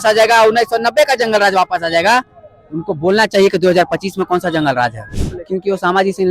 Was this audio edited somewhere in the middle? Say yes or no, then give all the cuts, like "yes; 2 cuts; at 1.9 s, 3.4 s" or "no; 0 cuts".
yes; 1 cut; at 5.2 s